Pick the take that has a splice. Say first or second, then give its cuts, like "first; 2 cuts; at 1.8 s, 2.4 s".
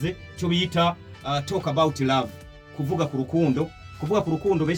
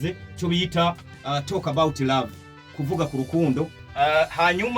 second; 1 cut; at 3.8 s